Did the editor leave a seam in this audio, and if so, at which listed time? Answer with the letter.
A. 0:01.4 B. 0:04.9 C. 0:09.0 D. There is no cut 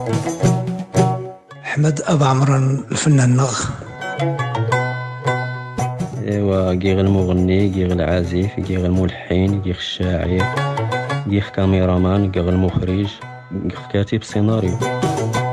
A